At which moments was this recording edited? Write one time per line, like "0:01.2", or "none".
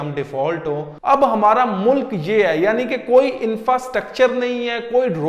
0:00.9